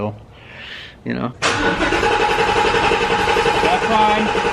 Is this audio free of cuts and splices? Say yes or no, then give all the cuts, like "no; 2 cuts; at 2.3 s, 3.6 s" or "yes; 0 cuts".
no; 1 cut; at 1.3 s